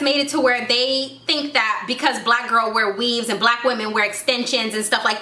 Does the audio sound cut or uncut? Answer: uncut